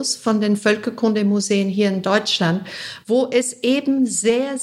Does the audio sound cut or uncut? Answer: uncut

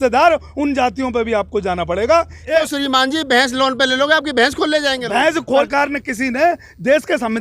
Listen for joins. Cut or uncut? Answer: cut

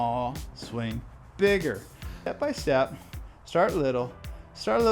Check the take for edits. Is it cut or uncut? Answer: cut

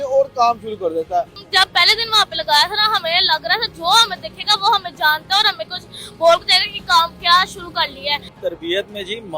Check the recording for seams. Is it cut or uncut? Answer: cut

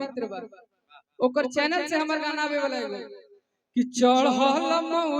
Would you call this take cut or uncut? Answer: uncut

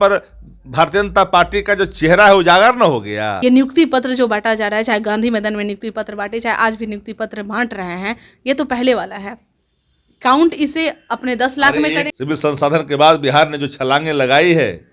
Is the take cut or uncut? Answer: cut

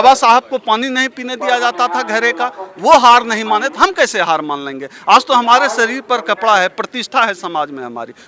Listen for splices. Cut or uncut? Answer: uncut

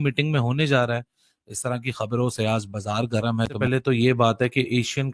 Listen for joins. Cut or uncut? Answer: cut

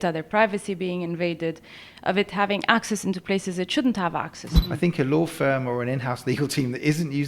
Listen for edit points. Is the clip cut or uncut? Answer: cut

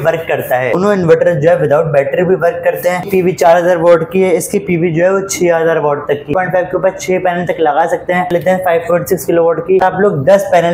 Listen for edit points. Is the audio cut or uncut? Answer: cut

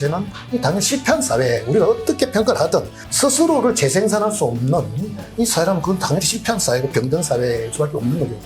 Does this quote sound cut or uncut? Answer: cut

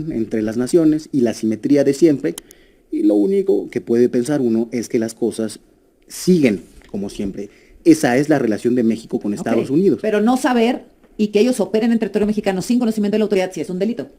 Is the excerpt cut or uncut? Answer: uncut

